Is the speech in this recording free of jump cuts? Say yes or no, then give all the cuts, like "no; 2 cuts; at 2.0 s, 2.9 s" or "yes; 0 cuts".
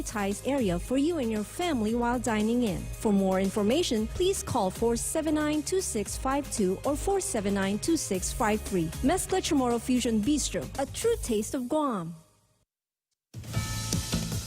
no; 1 cut; at 12.9 s